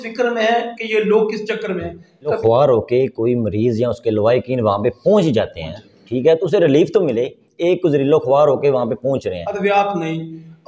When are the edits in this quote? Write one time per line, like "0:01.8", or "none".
0:02.4
0:09.4

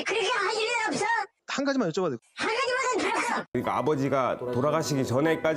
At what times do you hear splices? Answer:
0:03.6

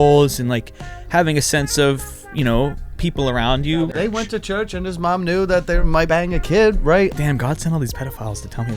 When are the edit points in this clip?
0:03.9
0:06.0
0:07.1

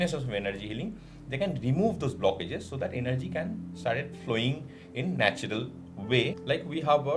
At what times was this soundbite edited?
0:06.2

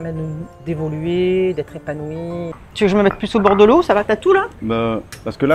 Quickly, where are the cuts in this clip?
0:02.5
0:04.6

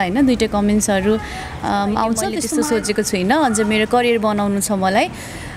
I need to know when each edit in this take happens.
0:02.4

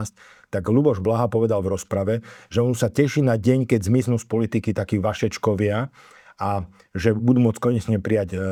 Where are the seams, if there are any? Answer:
none

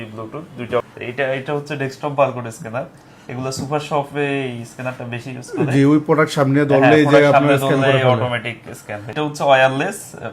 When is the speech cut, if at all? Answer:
0:00.9
0:09.1

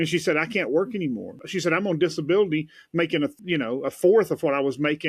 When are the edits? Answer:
0:01.4
0:03.3

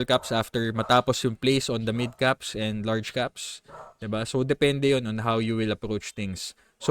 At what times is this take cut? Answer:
none

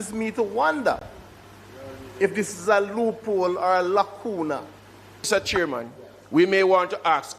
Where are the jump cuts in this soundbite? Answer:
0:05.3

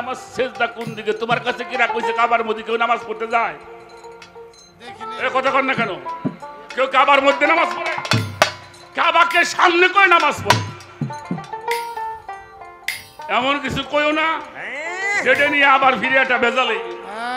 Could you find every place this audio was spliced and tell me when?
none

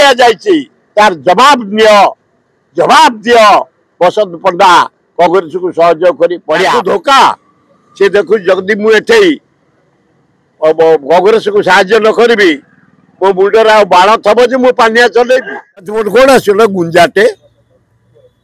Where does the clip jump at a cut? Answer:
0:06.7
0:16.0

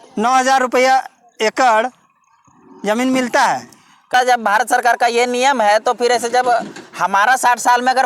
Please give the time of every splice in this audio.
0:04.1

